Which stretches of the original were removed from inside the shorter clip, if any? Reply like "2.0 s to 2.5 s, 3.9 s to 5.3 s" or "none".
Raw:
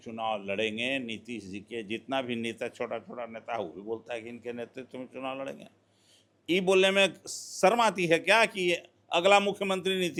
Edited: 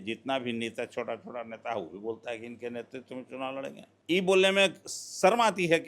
5.7 s to 6.3 s